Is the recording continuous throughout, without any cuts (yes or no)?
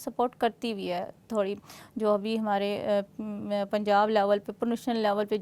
yes